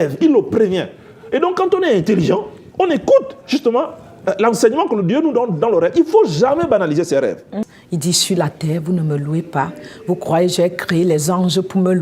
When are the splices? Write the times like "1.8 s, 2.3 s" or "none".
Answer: 7.8 s